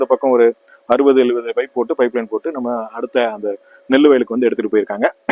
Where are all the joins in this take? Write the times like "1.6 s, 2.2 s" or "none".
none